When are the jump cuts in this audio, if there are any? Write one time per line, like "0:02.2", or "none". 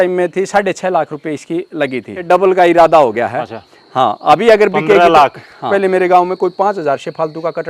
0:02.1
0:05.7